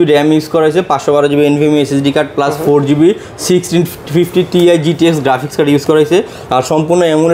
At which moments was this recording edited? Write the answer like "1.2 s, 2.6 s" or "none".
none